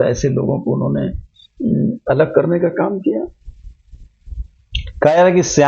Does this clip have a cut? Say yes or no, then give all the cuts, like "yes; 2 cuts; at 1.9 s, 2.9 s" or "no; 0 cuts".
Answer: no; 0 cuts